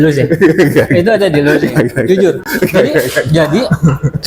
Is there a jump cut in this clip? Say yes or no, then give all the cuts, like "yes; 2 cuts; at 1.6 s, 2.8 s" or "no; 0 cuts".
no; 0 cuts